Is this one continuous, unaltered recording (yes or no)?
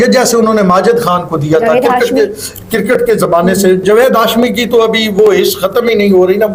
yes